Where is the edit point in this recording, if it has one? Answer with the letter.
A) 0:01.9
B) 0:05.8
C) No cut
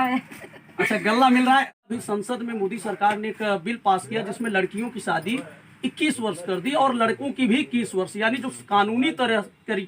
A